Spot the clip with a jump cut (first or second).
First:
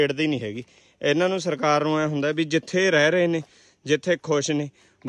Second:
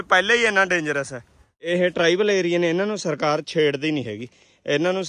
second